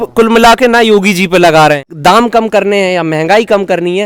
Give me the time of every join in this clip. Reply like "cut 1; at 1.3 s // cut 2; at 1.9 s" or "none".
cut 1; at 1.9 s